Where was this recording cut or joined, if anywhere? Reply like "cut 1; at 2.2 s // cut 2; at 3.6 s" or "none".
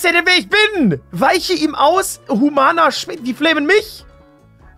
cut 1; at 1.1 s